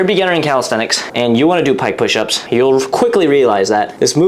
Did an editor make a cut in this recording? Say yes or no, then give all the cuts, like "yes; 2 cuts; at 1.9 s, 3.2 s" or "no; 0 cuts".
yes; 2 cuts; at 1.0 s, 2.3 s